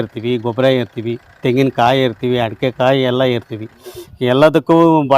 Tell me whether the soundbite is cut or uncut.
uncut